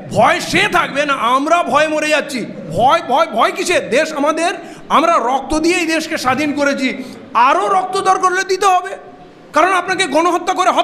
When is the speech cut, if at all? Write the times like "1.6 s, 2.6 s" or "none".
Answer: 2.7 s

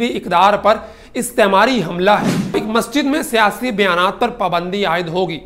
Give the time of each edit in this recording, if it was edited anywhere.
2.6 s

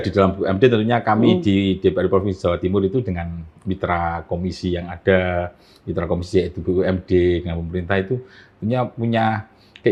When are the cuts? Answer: none

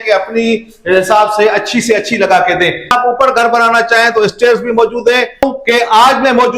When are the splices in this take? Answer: 2.9 s, 5.5 s

